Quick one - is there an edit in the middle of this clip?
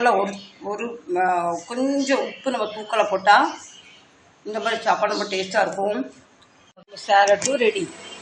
yes; 1 cut; at 6.9 s

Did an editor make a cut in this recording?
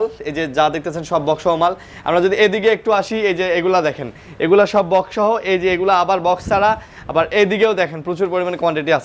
no; 0 cuts

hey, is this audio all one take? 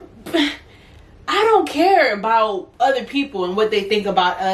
yes; 0 cuts

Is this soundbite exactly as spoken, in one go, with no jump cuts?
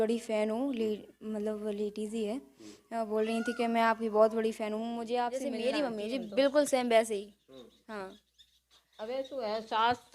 no; 1 cut; at 5.4 s

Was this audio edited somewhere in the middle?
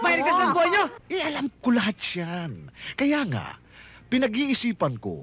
no; 0 cuts

